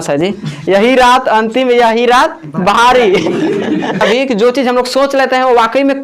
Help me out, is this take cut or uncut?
cut